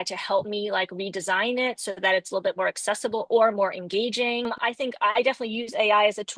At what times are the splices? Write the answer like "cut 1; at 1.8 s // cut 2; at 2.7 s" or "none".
cut 1; at 4.6 s